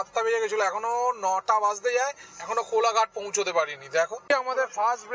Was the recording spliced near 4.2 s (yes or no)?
yes